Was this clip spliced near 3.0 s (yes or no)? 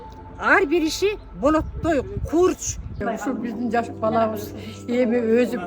yes